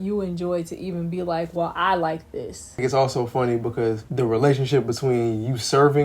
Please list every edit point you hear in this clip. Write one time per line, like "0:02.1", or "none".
0:02.8
0:04.0